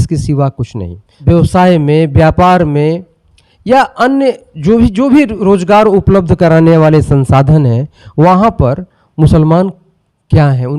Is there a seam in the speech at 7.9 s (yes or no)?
no